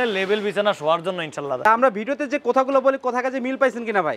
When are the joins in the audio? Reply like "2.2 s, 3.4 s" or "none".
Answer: 1.6 s